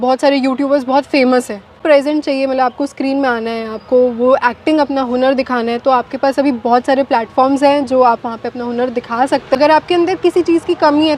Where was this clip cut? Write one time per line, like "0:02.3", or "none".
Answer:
0:01.8
0:09.6